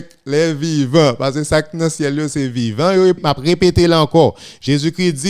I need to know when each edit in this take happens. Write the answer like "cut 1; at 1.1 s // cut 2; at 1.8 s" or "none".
cut 1; at 3.2 s